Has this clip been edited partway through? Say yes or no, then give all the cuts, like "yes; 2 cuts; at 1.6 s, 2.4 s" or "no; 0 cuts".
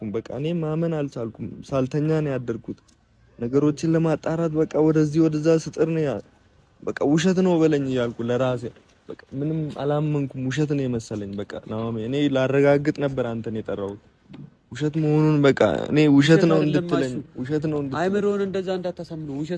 no; 0 cuts